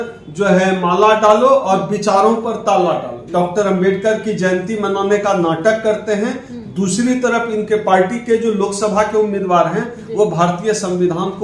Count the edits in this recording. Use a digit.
1